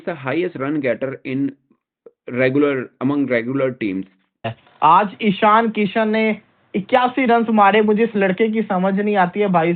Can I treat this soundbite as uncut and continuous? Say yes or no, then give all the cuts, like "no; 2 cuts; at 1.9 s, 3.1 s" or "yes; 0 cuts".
no; 1 cut; at 4.5 s